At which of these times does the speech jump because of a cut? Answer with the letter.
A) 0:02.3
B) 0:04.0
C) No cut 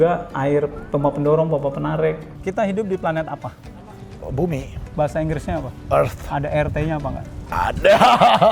A